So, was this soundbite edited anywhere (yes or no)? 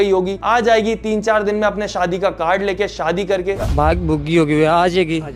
yes